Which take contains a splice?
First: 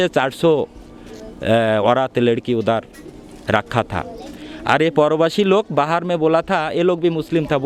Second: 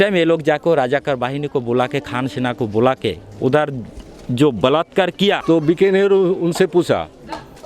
second; 1 cut; at 5.4 s

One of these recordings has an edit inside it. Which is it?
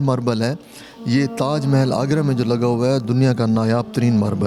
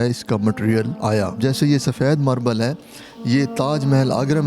second; 1 cut; at 1.2 s

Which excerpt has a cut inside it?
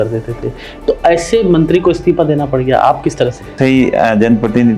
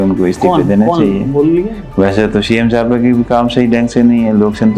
first; 1 cut; at 3.5 s

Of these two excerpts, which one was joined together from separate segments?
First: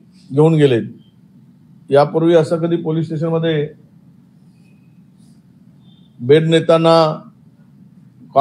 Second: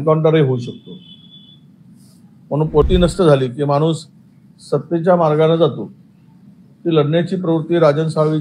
second; 1 cut; at 2.8 s

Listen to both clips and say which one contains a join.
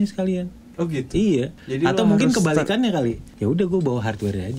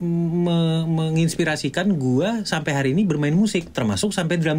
first; 2 cuts; at 1.6 s, 3.3 s

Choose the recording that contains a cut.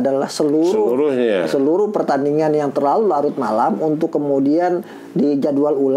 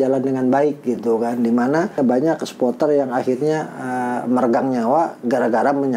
second; 1 cut; at 2.0 s

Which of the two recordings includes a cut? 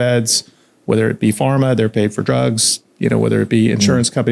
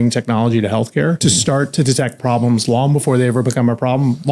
second; 1 cut; at 1.2 s

